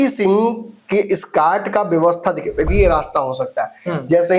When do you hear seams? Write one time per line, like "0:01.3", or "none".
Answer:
0:02.7